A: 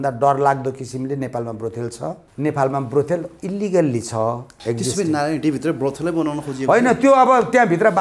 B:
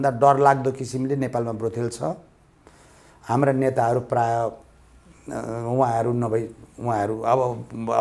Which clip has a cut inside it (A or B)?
A